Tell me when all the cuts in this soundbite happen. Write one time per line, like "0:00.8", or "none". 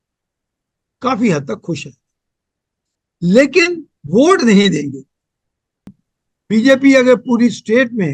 0:06.0